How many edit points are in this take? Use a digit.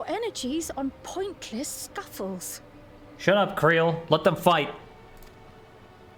0